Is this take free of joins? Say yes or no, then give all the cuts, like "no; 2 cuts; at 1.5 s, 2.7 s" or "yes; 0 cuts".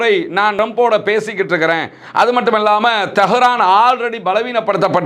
yes; 0 cuts